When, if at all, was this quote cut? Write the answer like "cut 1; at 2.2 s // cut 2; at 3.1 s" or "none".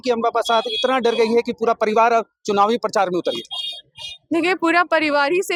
none